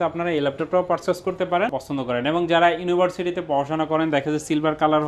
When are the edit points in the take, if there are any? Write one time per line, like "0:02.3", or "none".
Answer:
0:01.8